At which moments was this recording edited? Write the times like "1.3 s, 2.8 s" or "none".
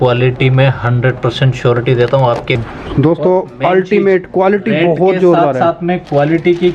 2.6 s